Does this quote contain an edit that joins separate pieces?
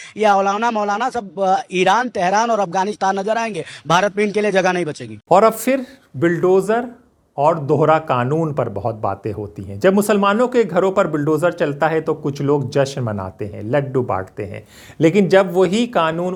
no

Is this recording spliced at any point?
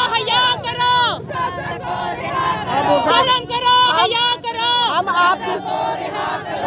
no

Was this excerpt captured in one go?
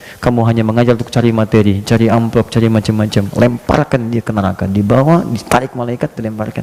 yes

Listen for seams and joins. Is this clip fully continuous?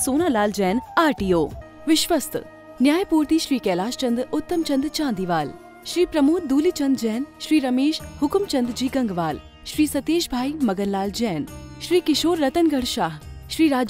no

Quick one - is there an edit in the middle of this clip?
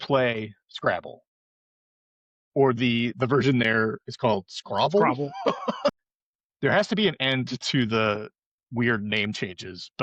no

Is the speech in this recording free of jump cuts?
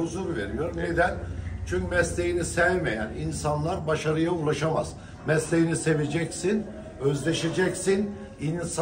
yes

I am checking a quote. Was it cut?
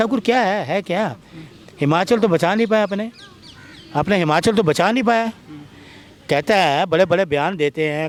no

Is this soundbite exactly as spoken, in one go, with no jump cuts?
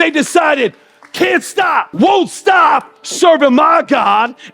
no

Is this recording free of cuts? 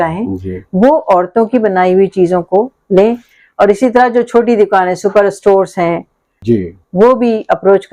no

